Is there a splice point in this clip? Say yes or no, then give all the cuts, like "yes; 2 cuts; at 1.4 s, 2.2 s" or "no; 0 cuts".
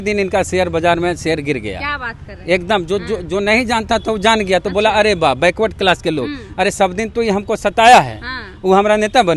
no; 0 cuts